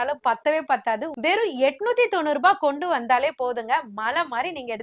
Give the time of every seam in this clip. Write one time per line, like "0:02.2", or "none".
0:01.1